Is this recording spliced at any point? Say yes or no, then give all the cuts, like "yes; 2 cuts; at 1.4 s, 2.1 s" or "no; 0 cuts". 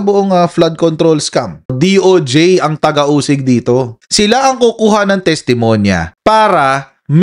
yes; 1 cut; at 1.7 s